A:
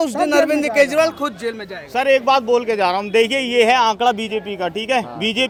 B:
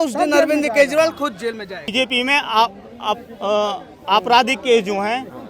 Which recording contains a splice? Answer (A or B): B